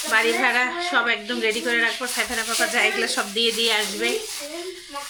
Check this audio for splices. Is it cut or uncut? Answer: uncut